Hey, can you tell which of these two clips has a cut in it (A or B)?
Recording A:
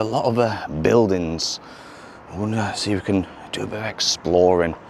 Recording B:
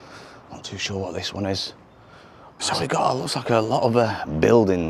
B